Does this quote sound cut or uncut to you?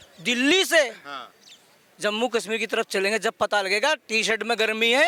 uncut